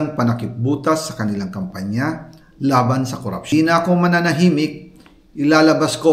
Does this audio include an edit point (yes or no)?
yes